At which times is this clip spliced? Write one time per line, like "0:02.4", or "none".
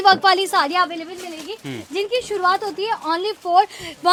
none